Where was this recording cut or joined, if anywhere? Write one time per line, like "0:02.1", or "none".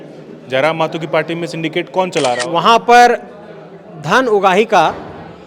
0:02.4